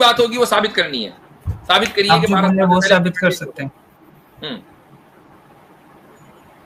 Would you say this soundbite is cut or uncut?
uncut